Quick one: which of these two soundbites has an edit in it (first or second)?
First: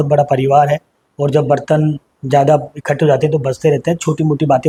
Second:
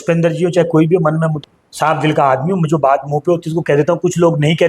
second